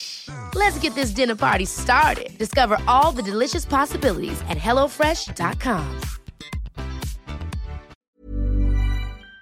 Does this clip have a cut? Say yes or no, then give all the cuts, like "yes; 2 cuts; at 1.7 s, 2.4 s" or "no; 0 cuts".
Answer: yes; 1 cut; at 7.9 s